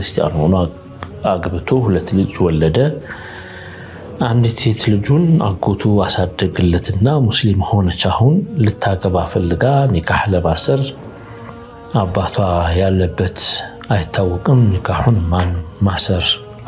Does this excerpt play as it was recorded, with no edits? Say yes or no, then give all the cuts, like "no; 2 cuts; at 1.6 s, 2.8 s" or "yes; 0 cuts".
yes; 0 cuts